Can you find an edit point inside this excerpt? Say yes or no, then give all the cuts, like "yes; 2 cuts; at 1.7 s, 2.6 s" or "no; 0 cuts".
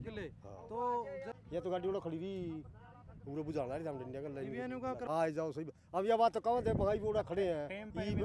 yes; 2 cuts; at 1.3 s, 5.1 s